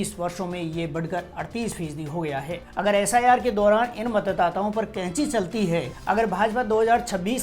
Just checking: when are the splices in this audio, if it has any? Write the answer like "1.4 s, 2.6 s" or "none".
2.6 s, 5.9 s

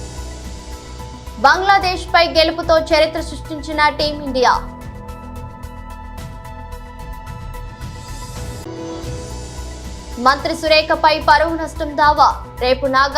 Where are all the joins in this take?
none

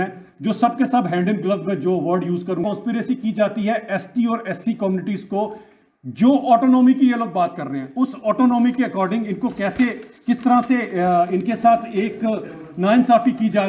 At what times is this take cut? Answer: none

